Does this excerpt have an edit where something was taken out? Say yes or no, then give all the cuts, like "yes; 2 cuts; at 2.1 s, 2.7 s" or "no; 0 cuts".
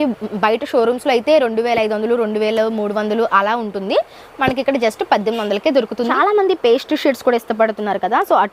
yes; 1 cut; at 6.1 s